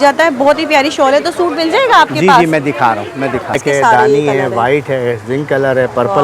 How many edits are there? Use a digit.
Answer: 1